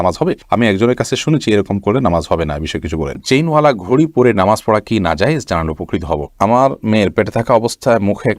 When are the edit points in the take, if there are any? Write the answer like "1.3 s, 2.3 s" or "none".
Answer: 3.2 s, 6.3 s

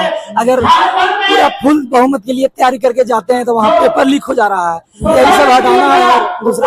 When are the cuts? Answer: none

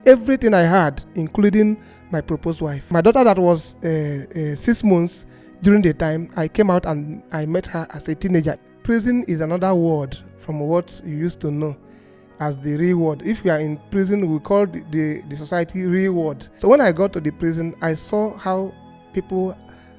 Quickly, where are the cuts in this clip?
1.2 s, 2.7 s, 8.5 s, 16.5 s

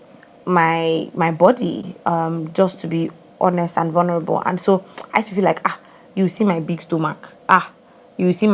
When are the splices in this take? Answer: none

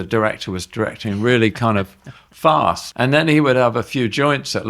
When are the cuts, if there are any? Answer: 2.8 s

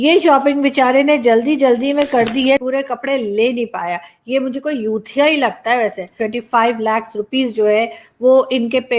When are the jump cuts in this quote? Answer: 2.6 s, 6.2 s

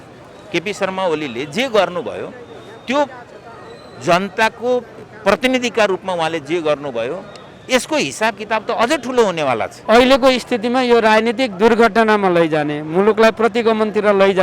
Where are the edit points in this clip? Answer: 9.7 s

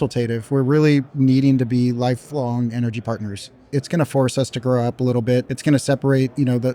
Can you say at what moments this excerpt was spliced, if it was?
3.7 s, 5.5 s

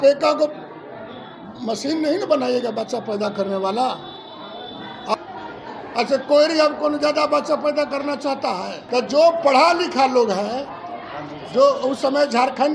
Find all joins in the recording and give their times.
5.1 s, 8.8 s

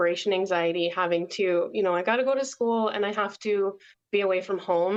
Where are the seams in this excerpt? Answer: none

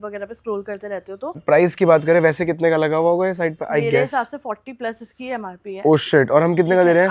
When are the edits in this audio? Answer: 1.4 s

